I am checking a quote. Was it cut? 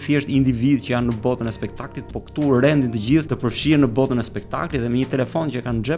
yes; 1 cut; at 3.3 s

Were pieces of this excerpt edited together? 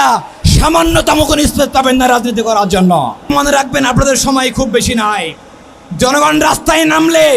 yes; 1 cut; at 3.3 s

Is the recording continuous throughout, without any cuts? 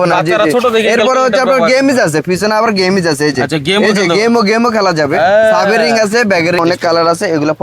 no; 1 cut; at 6.6 s

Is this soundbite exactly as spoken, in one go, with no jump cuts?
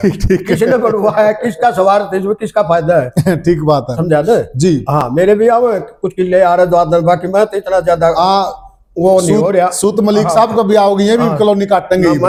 yes; 0 cuts

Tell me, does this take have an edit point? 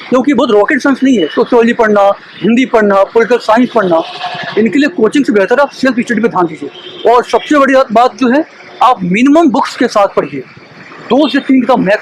no; 0 cuts

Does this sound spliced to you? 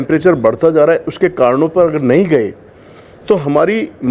no; 0 cuts

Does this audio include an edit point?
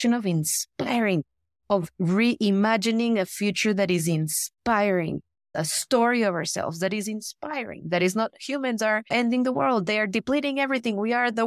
yes; 2 cuts; at 5.5 s, 9.1 s

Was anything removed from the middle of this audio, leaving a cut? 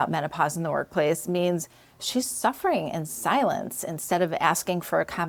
no; 0 cuts

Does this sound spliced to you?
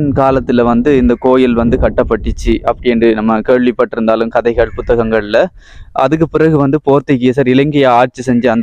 no; 0 cuts

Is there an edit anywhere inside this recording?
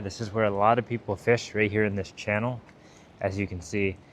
no; 0 cuts

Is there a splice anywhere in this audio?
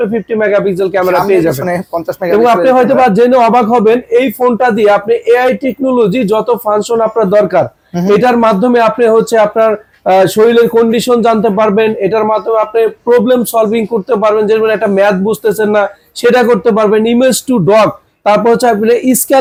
no; 0 cuts

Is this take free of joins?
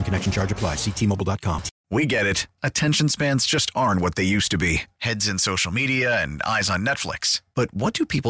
no; 1 cut; at 1.7 s

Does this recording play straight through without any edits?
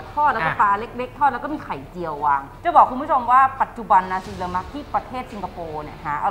yes; 0 cuts

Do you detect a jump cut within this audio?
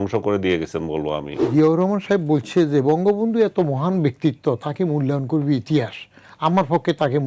yes; 1 cut; at 1.5 s

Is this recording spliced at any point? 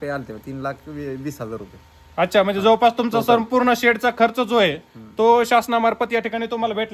no; 0 cuts

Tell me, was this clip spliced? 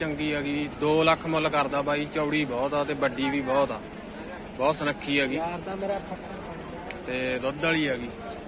no; 0 cuts

